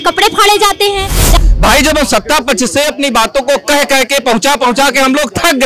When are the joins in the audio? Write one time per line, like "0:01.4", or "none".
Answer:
0:01.3